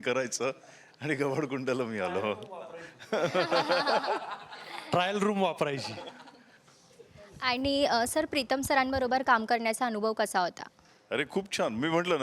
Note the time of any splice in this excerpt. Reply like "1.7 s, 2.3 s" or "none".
none